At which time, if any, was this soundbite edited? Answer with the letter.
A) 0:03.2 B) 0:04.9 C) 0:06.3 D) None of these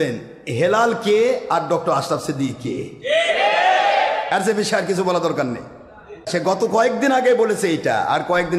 C